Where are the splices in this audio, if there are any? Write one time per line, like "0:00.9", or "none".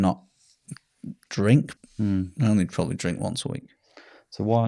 0:01.8